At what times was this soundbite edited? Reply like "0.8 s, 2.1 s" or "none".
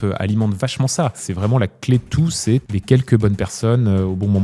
1.3 s, 2.7 s